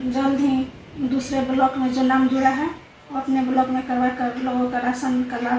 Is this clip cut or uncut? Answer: uncut